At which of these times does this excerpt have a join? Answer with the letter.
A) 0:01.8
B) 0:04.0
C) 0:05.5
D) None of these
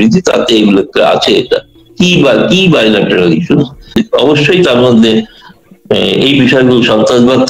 B